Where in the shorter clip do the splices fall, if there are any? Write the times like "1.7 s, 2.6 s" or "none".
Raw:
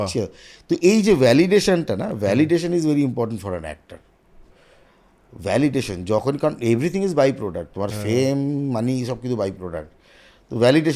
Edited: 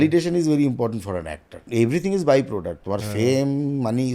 1.7 s